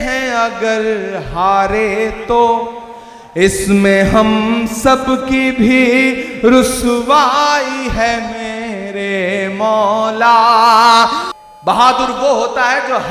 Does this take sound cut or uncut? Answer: cut